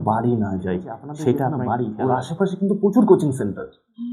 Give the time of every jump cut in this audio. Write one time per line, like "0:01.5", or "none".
0:01.6